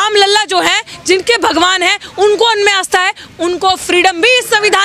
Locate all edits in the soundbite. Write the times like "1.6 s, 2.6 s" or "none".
none